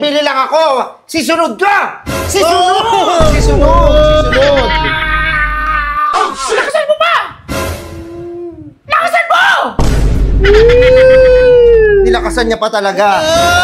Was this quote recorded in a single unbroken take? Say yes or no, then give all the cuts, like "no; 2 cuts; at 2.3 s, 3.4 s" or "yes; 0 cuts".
yes; 0 cuts